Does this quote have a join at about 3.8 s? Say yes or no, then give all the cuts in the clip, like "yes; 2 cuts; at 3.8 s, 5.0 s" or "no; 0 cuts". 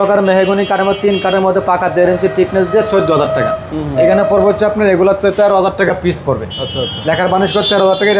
no; 0 cuts